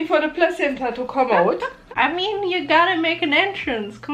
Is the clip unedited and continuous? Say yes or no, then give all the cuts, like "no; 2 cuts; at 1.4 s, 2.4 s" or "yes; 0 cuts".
no; 1 cut; at 1.8 s